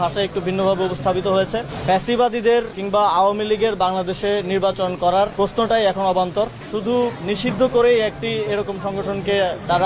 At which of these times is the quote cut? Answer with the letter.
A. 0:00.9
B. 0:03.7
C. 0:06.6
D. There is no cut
C